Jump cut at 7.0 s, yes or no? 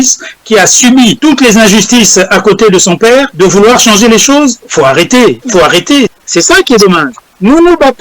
no